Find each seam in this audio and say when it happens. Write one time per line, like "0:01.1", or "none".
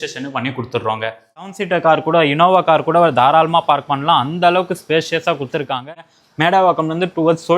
0:01.5
0:05.8